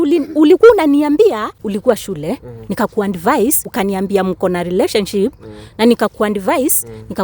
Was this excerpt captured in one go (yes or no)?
no